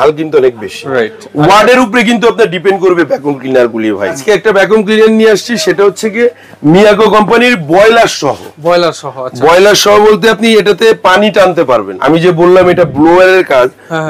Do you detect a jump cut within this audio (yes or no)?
yes